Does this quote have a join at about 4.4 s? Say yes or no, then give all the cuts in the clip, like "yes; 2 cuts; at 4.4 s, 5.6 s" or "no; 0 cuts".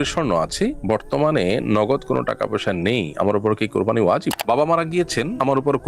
yes; 1 cut; at 4.4 s